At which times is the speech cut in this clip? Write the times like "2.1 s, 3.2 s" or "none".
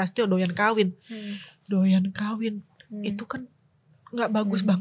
none